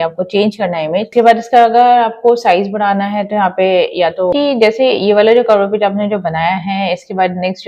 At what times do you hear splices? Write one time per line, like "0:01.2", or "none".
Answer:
0:01.1
0:04.3